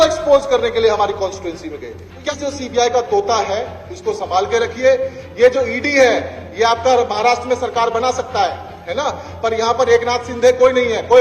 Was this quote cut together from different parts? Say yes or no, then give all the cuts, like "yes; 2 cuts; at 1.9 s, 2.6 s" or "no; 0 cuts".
yes; 1 cut; at 2.2 s